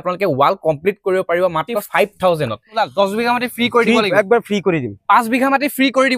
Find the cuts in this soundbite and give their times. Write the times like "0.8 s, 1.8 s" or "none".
1.8 s, 2.8 s